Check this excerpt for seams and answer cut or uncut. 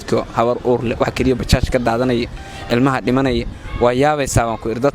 cut